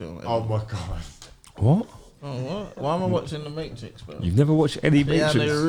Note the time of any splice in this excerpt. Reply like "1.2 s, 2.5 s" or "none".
none

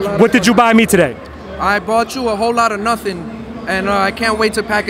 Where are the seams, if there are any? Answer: none

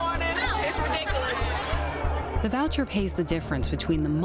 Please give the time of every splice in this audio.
none

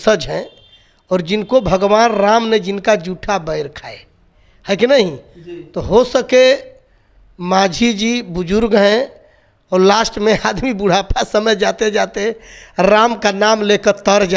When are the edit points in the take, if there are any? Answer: none

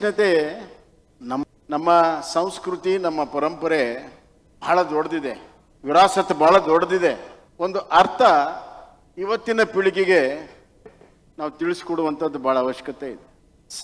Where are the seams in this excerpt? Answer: 1.4 s

